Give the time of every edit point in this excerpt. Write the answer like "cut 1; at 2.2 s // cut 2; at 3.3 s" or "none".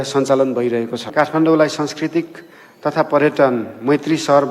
cut 1; at 1.1 s